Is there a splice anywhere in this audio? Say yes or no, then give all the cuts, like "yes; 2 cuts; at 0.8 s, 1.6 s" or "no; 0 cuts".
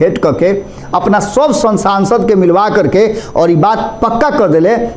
no; 0 cuts